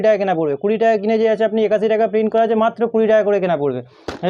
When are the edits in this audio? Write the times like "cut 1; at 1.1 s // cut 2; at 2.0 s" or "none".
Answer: none